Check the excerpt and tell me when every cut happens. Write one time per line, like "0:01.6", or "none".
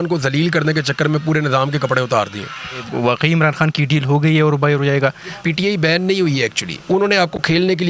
0:02.8
0:05.4

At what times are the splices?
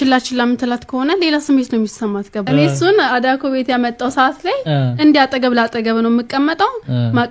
0:02.4

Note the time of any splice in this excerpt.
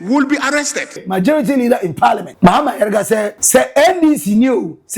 0:01.0
0:02.3
0:03.4

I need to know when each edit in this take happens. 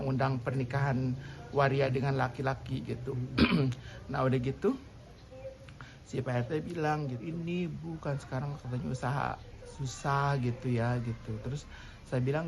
0:07.2

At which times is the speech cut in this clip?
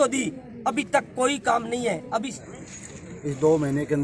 0:02.4

